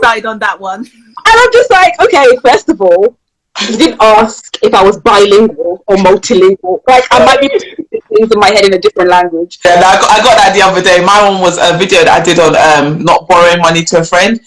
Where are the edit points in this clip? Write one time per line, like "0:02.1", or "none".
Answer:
0:09.7